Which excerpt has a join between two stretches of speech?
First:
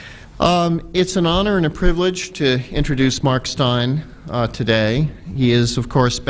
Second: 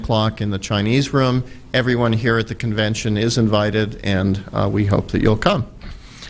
first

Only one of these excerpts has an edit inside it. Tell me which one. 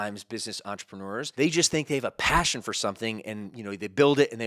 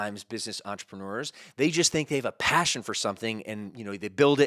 first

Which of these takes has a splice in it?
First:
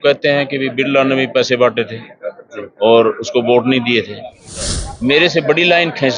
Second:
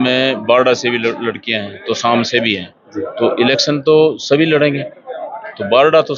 first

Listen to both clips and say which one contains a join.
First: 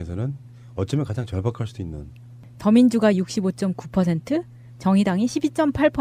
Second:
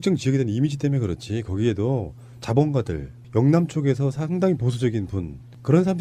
second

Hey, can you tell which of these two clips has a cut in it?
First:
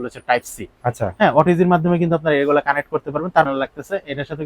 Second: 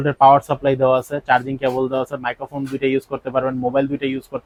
first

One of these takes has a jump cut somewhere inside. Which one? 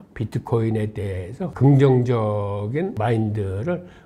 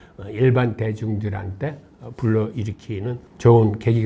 first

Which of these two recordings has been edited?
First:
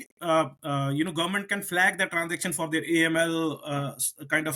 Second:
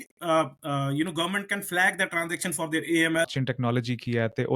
second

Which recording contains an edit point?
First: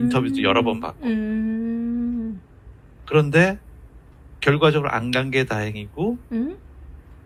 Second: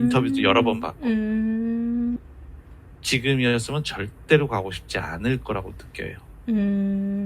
second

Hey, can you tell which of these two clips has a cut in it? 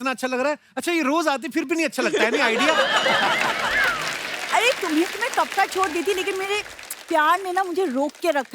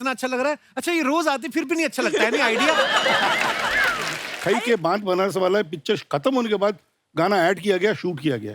second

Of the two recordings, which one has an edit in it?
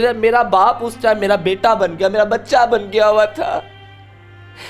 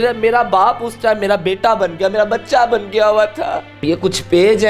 second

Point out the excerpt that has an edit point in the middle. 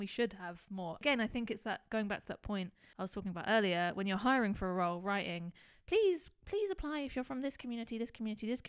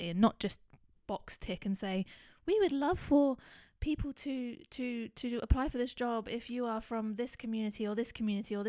first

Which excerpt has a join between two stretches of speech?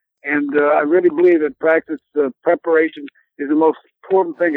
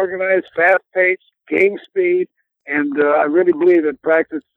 second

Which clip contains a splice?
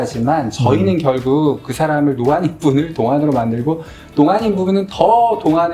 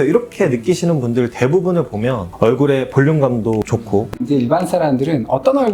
second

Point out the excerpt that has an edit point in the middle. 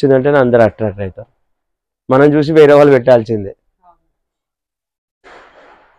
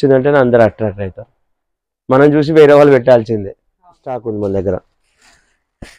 second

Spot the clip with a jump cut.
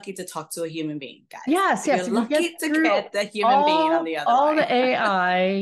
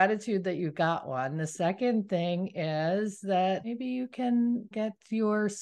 second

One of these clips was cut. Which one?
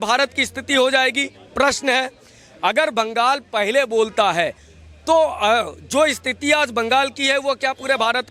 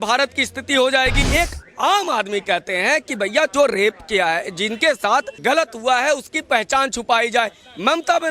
second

